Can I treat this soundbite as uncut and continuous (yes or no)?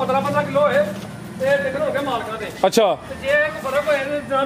yes